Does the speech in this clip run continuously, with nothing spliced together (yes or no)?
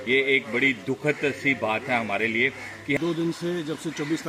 no